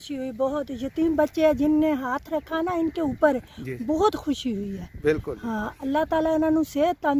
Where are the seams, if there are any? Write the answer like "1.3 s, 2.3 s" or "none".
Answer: none